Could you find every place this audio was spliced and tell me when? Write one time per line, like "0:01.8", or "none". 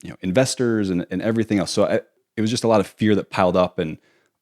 0:02.2